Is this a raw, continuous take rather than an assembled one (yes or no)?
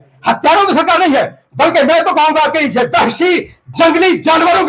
yes